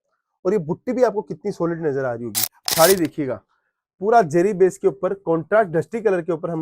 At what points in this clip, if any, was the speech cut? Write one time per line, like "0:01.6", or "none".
0:02.5

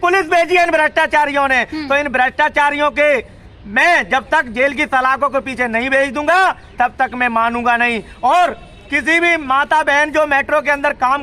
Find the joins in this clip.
none

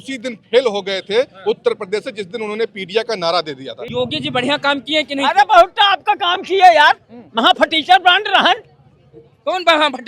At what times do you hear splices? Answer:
0:03.7

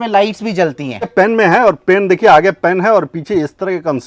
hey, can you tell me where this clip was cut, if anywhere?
0:01.1

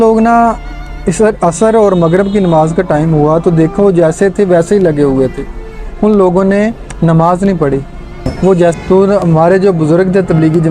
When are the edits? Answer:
0:08.8

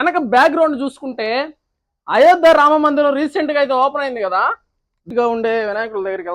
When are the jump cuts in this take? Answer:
0:05.1

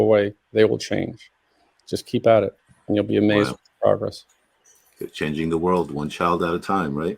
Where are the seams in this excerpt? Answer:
none

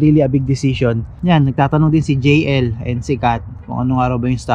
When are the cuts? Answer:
0:01.1

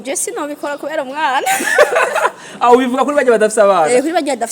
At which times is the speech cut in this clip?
none

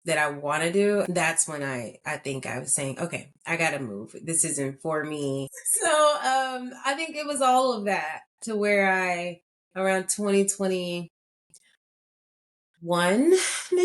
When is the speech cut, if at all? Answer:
0:01.1
0:05.6

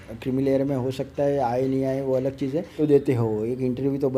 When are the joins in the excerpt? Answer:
0:02.7

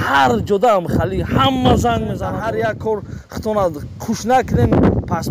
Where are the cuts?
0:02.3

